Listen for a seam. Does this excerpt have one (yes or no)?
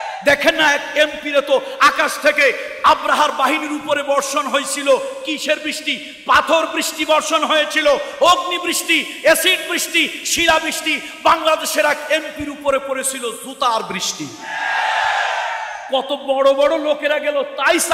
no